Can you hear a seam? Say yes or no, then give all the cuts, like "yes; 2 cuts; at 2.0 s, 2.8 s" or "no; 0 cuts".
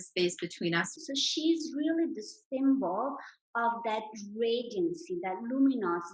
yes; 1 cut; at 0.9 s